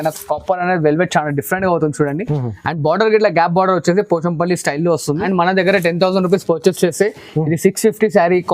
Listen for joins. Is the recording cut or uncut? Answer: cut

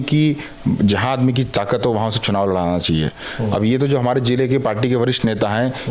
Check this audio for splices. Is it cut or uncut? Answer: uncut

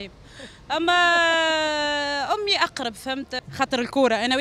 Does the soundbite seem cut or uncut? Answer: cut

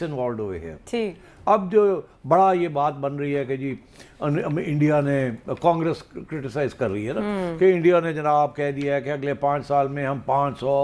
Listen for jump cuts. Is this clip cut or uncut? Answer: uncut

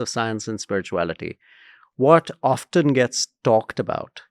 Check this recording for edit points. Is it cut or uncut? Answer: uncut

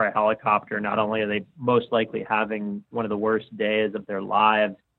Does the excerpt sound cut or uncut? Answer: uncut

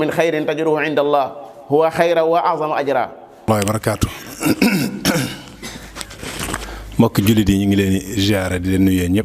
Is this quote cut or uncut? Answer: cut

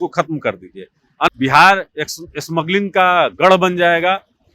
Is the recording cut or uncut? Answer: cut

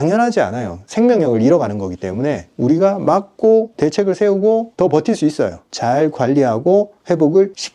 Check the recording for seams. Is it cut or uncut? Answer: cut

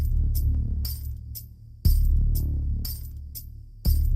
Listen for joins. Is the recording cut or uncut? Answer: cut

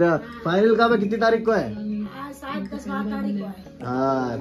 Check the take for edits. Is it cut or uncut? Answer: uncut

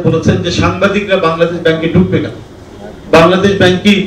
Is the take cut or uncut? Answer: uncut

